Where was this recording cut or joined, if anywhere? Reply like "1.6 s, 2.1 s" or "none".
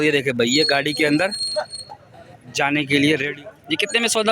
3.3 s